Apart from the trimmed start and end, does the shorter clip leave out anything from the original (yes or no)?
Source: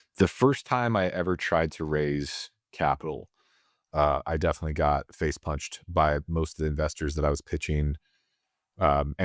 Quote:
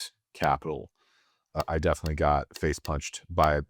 yes